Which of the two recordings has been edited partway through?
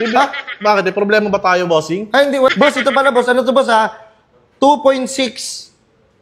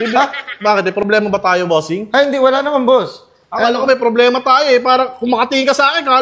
first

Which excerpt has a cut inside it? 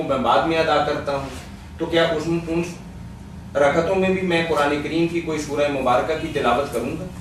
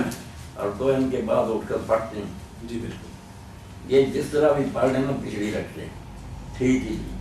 first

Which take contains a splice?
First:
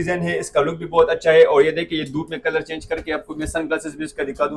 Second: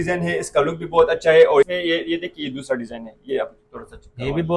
second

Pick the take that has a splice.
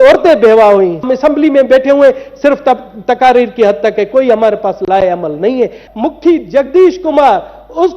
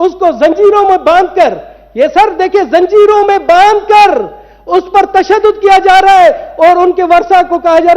first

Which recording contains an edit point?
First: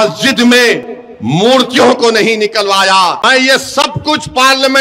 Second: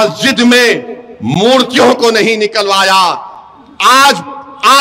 first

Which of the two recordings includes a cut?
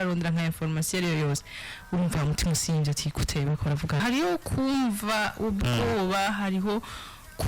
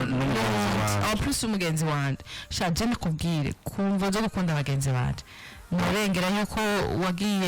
first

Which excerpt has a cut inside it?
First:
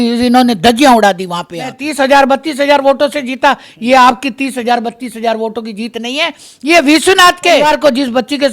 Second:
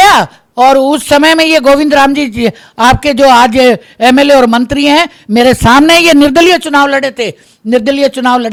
first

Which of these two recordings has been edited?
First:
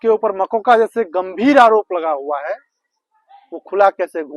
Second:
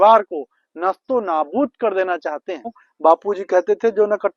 second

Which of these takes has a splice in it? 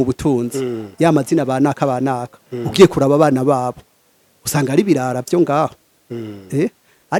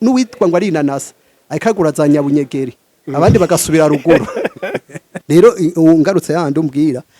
second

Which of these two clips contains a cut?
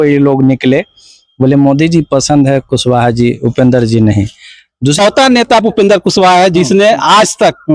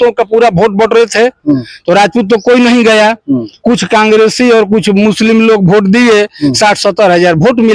first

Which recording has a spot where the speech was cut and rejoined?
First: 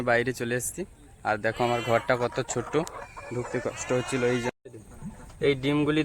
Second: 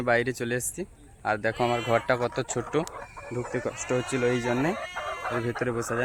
first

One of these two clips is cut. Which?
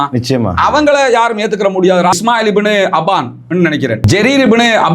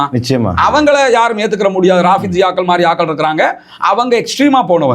first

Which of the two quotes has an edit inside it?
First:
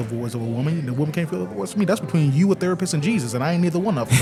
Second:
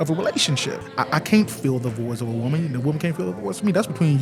second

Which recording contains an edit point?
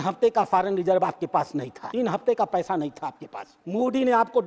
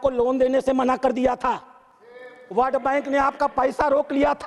first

